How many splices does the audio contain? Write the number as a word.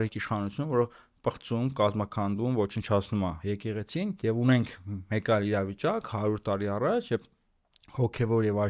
one